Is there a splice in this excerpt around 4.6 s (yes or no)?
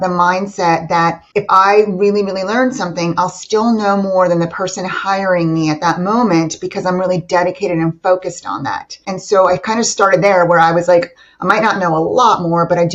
no